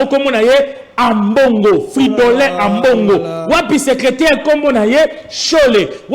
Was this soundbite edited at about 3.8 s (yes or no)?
no